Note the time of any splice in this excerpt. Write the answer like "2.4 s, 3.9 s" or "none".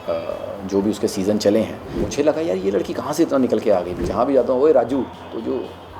2.1 s, 4.0 s